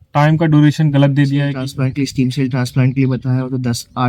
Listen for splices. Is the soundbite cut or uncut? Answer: cut